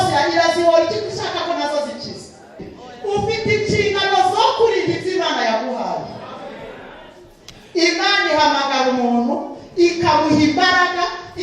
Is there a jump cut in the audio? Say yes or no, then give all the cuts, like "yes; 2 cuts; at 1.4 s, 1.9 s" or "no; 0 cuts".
yes; 1 cut; at 2.7 s